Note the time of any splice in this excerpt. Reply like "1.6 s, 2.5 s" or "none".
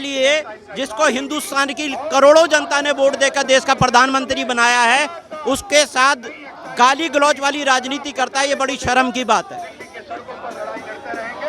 none